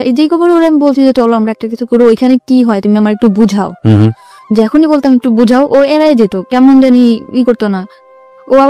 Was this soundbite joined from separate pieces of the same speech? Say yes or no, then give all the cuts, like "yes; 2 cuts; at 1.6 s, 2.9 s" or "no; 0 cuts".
no; 0 cuts